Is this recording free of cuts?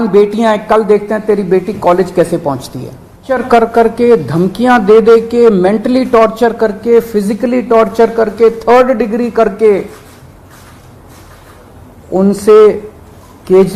no; 1 cut; at 3.4 s

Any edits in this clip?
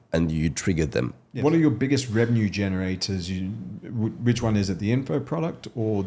yes; 1 cut; at 1.2 s

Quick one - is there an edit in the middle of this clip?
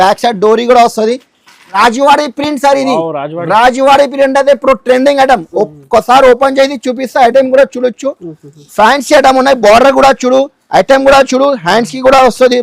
yes; 1 cut; at 1.7 s

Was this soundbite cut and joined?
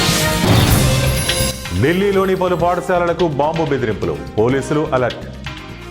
yes; 1 cut; at 1.1 s

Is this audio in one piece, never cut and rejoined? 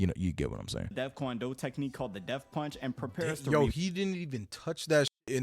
no; 1 cut; at 0.9 s

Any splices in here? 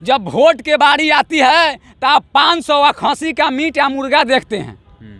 no; 0 cuts

